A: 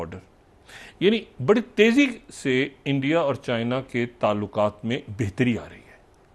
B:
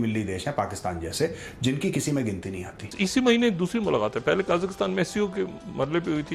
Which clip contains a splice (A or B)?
B